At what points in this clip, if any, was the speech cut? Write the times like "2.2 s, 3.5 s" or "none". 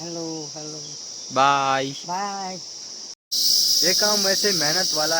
3.2 s